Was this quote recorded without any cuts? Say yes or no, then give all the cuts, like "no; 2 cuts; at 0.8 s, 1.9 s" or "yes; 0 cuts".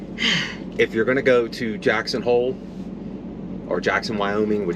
yes; 0 cuts